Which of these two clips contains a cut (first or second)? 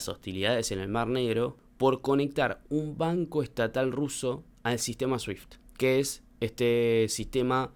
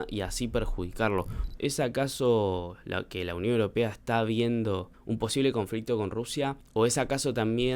second